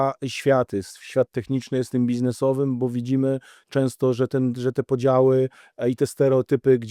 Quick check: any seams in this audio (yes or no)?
no